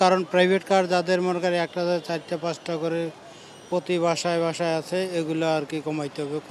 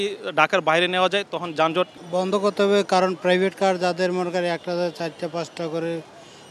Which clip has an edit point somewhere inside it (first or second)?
second